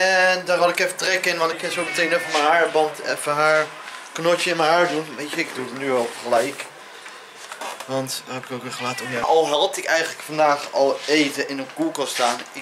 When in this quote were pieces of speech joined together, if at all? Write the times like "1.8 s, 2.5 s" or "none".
1.6 s, 9.2 s